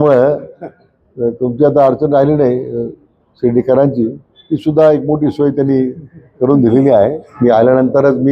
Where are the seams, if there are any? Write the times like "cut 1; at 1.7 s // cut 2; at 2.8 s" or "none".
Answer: cut 1; at 7.2 s